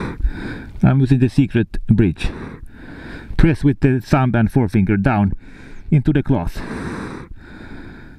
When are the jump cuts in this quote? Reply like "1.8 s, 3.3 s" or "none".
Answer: none